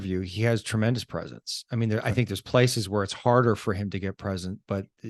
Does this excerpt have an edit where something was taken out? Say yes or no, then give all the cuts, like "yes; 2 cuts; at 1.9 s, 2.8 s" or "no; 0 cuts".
no; 0 cuts